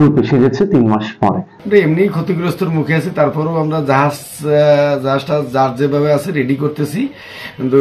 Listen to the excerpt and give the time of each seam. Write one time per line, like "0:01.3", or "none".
0:01.5